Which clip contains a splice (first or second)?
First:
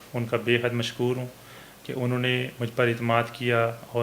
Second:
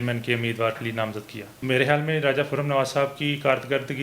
second